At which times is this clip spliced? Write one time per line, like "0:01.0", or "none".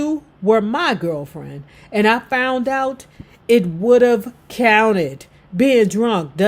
none